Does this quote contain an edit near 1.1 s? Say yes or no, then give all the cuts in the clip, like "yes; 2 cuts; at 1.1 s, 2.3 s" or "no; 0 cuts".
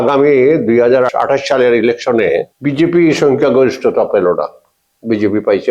yes; 2 cuts; at 1.1 s, 2.5 s